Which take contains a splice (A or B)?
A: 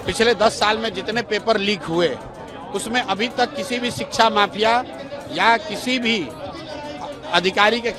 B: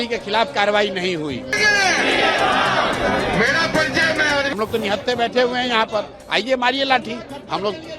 B